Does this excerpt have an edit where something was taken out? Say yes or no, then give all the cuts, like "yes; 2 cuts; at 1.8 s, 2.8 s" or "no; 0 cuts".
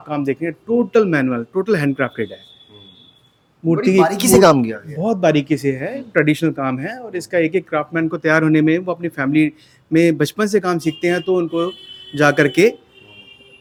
no; 0 cuts